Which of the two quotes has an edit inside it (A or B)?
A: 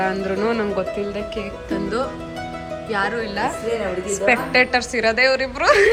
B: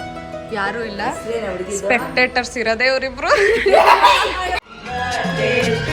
B